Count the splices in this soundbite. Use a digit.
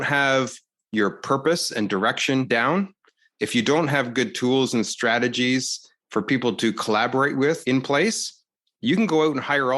2